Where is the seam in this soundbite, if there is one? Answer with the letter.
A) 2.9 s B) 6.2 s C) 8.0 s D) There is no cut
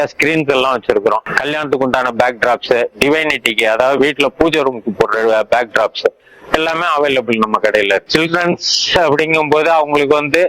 C